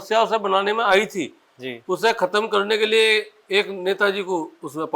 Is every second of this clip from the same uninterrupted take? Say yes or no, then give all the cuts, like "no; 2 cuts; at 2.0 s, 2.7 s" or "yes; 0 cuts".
yes; 0 cuts